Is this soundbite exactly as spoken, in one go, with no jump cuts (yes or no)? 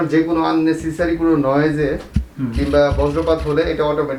yes